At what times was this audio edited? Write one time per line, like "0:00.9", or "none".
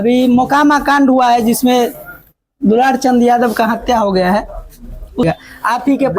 0:05.2